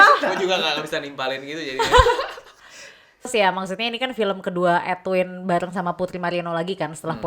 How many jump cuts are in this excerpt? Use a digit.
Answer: 1